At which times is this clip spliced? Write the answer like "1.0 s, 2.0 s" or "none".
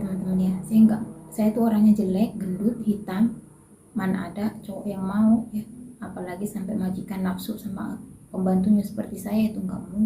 none